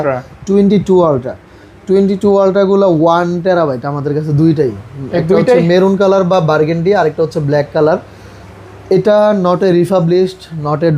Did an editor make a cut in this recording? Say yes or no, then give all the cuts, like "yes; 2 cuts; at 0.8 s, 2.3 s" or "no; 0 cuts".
no; 0 cuts